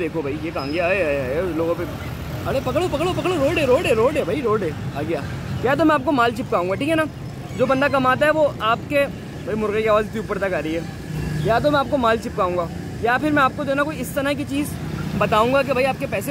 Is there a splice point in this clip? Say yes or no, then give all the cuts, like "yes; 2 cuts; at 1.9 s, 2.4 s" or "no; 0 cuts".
no; 0 cuts